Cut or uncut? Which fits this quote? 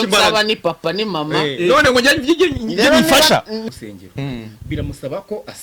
cut